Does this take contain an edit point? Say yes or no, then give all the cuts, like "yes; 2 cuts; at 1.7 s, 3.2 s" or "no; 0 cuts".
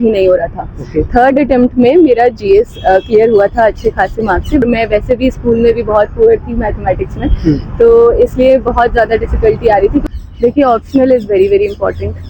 yes; 2 cuts; at 4.6 s, 10.0 s